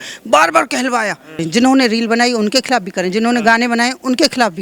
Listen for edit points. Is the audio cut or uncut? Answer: cut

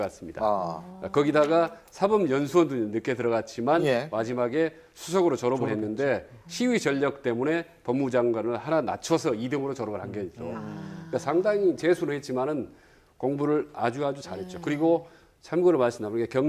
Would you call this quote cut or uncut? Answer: cut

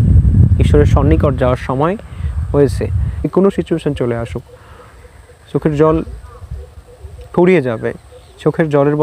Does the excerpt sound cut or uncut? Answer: cut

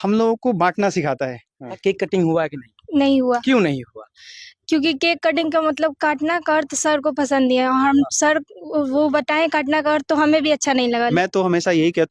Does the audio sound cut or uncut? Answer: cut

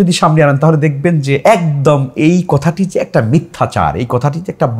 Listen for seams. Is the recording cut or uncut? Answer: uncut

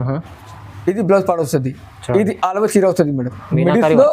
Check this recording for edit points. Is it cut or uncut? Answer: uncut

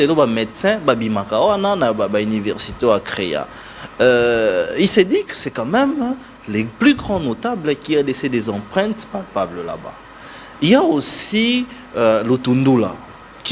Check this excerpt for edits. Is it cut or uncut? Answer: uncut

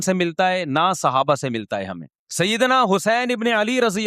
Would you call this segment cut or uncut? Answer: cut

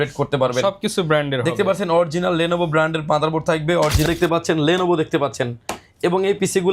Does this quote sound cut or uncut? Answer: cut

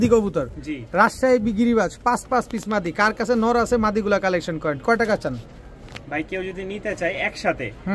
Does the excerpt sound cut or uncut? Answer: uncut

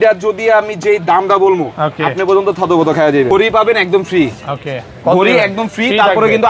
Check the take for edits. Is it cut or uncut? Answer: cut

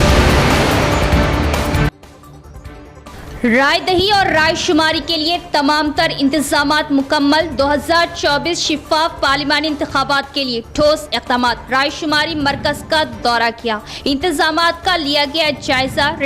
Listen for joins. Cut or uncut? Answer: cut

